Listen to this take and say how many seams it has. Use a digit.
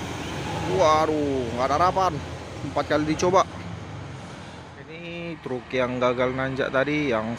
1